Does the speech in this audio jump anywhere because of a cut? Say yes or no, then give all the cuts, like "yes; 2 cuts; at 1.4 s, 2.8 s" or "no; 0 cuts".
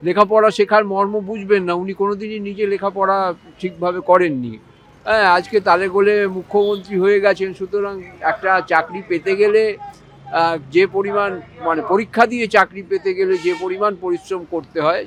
no; 0 cuts